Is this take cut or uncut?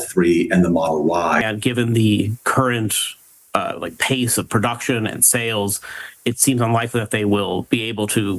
cut